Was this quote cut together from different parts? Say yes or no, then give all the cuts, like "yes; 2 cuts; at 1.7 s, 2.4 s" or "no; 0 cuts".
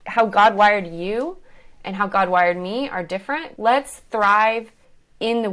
yes; 1 cut; at 3.4 s